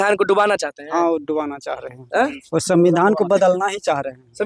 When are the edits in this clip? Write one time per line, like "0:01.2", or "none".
none